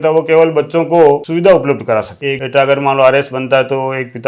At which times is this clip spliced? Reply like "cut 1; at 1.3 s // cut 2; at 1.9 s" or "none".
cut 1; at 2.2 s